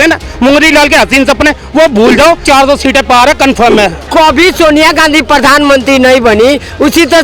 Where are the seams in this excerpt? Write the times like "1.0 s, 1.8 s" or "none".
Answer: 2.4 s, 4.1 s